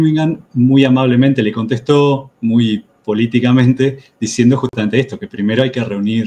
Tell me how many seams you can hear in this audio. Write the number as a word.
zero